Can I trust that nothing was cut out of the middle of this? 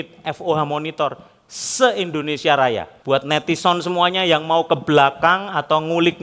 no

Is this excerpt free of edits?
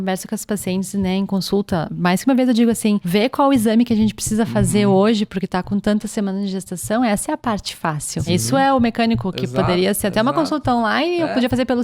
no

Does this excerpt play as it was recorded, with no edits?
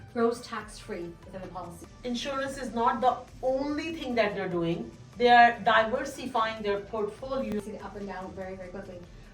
no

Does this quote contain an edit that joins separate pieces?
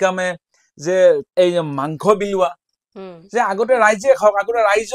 yes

